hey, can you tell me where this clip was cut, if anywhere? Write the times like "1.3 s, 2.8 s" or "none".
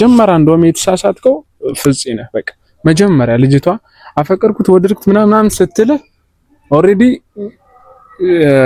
none